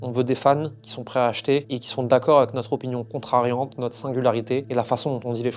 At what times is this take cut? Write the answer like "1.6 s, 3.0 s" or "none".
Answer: 4.7 s